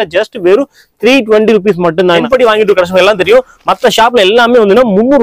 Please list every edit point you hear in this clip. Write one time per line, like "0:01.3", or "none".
0:02.1